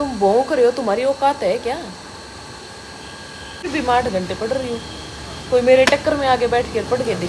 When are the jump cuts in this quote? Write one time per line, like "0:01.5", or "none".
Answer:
0:03.7